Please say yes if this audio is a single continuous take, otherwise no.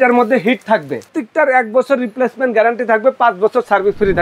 no